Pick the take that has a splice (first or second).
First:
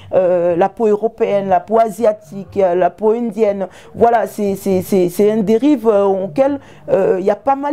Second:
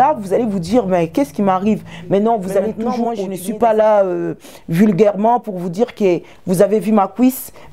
second